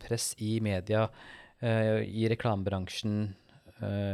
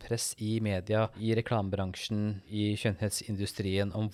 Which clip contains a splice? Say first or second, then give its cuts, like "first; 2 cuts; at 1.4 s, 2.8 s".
second; 2 cuts; at 1.2 s, 2.4 s